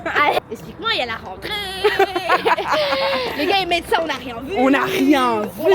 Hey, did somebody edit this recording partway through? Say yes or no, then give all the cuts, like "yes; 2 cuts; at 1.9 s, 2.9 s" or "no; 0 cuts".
no; 0 cuts